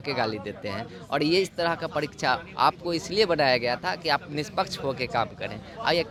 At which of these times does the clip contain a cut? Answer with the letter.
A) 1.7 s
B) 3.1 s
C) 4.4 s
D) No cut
D